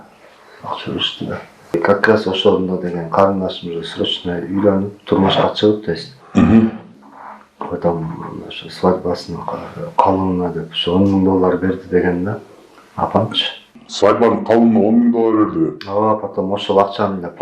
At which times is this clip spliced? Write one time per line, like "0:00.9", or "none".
none